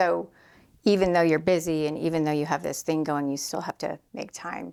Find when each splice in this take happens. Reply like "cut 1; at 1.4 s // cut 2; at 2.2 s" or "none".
none